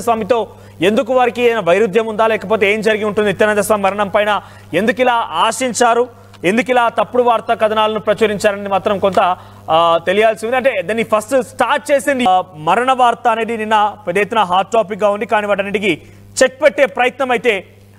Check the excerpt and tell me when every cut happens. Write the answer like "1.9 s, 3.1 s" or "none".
12.3 s